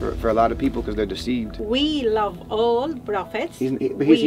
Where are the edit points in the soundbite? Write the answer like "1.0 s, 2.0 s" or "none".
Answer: 1.6 s

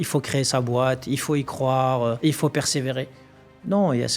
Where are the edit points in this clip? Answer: 2.2 s

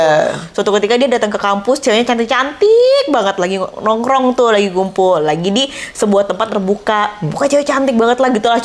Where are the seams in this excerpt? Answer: none

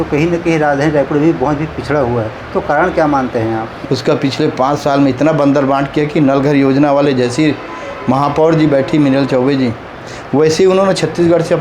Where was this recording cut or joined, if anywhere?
3.7 s

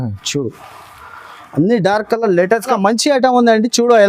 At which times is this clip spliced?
2.7 s

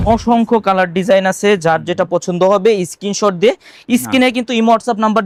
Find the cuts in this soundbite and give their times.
none

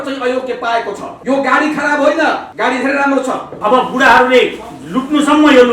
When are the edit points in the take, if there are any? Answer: 1.1 s, 2.5 s, 3.5 s

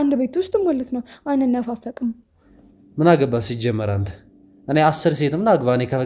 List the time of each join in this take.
2.6 s

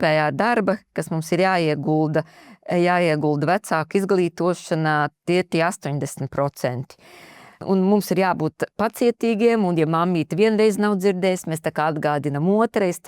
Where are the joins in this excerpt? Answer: 7.6 s

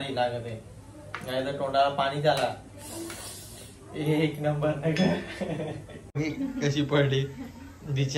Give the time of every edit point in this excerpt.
6.2 s

